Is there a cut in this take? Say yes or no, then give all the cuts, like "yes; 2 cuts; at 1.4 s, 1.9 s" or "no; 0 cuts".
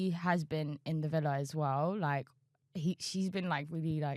no; 0 cuts